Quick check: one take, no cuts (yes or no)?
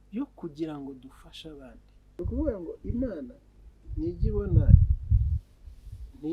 no